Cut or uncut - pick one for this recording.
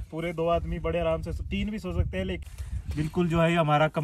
cut